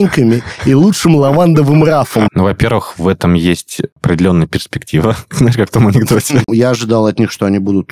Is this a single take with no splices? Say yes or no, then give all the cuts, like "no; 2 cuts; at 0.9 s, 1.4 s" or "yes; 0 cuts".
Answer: no; 3 cuts; at 2.3 s, 4.0 s, 6.5 s